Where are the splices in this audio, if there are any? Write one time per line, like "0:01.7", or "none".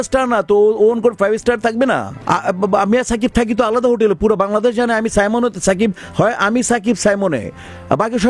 0:02.1